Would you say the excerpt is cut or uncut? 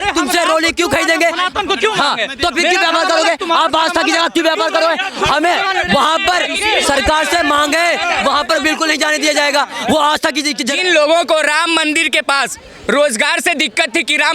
cut